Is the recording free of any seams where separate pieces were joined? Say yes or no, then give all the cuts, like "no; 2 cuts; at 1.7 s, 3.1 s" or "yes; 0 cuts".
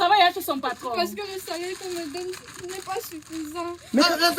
yes; 0 cuts